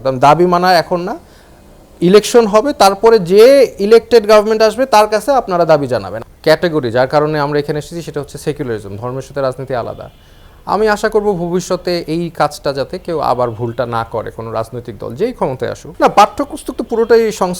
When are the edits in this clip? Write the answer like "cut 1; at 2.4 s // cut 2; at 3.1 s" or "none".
cut 1; at 6.1 s // cut 2; at 15.8 s